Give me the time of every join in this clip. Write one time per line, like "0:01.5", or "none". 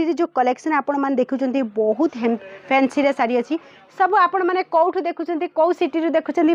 none